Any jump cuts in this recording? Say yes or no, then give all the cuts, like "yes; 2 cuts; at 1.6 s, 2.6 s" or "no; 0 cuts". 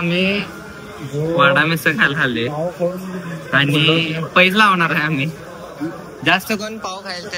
no; 0 cuts